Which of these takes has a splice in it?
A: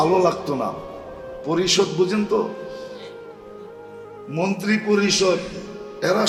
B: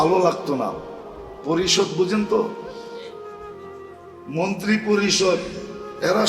B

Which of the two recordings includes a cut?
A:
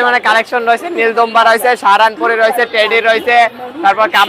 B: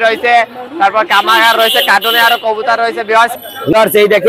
B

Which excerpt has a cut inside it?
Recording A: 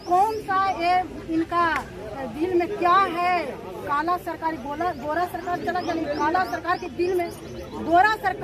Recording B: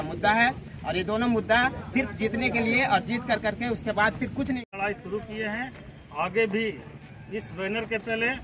B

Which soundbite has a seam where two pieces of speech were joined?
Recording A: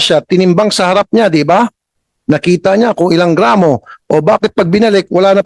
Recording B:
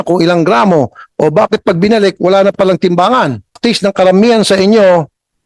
B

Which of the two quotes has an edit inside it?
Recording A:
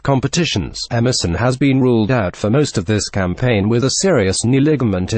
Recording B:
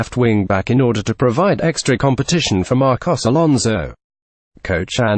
A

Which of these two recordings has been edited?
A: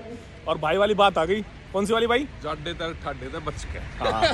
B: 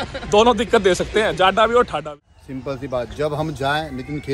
B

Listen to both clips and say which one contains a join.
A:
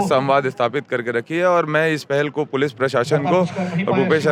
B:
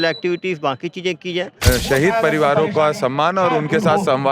B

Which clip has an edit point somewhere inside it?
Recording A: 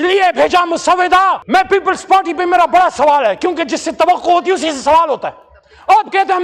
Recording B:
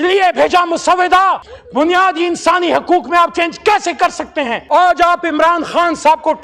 B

